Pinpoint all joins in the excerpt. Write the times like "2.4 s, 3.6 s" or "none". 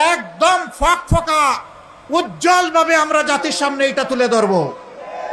none